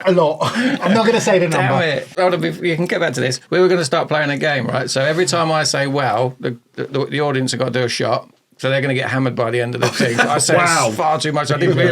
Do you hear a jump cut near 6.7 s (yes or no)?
no